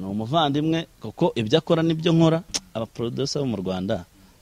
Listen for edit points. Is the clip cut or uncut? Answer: cut